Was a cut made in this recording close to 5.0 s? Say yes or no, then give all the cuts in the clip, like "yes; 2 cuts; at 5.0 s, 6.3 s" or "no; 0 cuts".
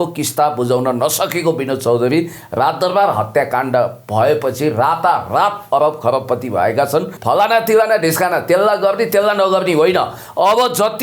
no; 1 cut; at 7.1 s